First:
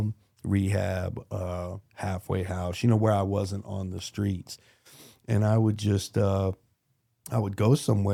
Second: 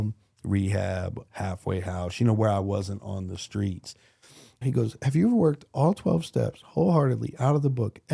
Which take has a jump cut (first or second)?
second